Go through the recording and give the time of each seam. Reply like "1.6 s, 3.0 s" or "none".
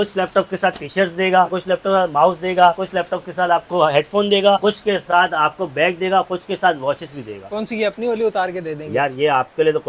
none